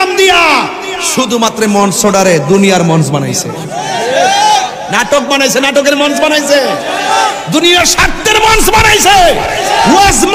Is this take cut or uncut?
uncut